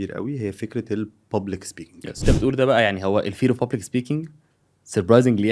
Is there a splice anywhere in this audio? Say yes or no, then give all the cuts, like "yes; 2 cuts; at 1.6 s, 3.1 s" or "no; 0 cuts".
yes; 1 cut; at 2.2 s